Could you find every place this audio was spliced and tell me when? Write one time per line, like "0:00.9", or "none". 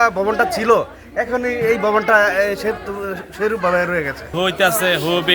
0:04.3